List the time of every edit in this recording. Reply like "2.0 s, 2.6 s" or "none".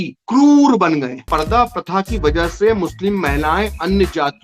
1.2 s